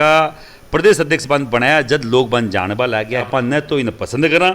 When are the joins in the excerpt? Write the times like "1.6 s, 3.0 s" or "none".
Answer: 3.3 s